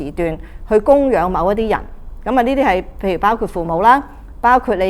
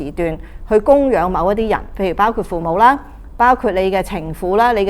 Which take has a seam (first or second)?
second